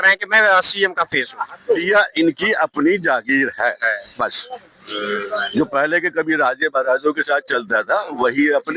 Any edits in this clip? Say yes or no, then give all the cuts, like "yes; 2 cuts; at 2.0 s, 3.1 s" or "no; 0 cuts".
yes; 1 cut; at 1.8 s